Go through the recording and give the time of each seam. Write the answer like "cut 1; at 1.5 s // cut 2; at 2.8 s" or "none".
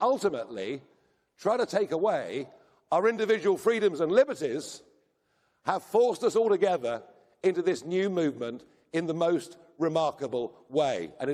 none